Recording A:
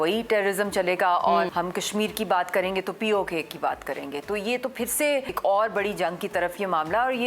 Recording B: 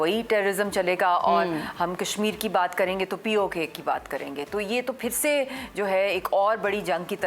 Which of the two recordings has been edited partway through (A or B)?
A